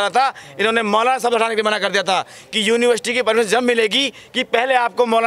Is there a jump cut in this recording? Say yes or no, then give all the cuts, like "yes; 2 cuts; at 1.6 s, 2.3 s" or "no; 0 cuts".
no; 0 cuts